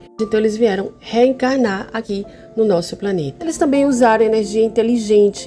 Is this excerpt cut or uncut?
cut